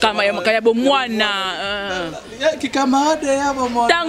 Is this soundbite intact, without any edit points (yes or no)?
yes